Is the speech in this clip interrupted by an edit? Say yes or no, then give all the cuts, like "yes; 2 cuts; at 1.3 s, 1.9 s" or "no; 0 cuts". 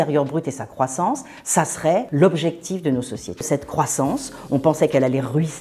yes; 2 cuts; at 2.1 s, 3.5 s